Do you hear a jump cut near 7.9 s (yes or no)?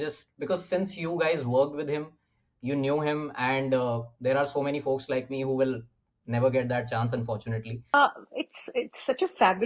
yes